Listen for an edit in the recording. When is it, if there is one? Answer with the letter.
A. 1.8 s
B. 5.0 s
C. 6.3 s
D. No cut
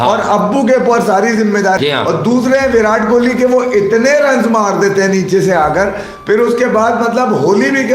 A